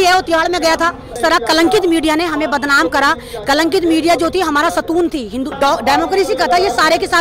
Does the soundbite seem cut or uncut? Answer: cut